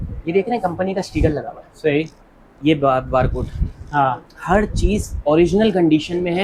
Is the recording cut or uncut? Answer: uncut